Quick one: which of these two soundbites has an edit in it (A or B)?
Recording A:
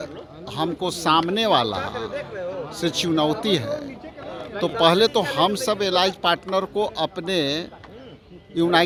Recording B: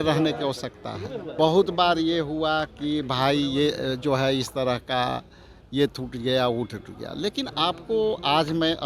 B